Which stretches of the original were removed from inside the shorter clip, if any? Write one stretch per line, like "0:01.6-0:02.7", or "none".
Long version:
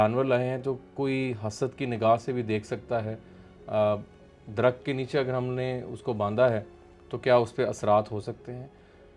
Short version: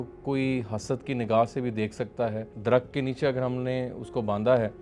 0:03.2-0:04.4